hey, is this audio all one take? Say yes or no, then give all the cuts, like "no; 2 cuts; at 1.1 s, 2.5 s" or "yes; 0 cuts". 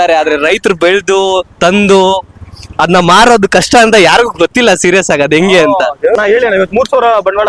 yes; 0 cuts